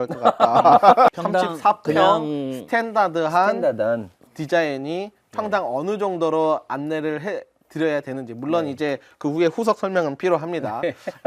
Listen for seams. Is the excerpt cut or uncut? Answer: cut